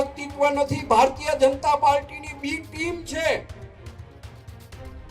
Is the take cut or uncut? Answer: uncut